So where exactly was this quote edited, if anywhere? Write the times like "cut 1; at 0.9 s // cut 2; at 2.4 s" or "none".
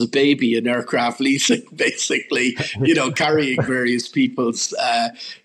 none